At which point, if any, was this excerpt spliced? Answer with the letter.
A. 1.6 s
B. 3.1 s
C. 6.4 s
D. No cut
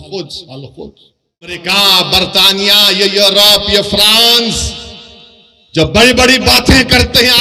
A